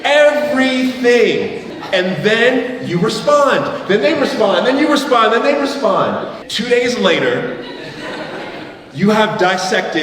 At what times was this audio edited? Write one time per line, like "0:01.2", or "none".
0:01.7
0:06.4